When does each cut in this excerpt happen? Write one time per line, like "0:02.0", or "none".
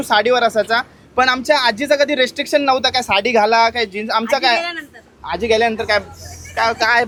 none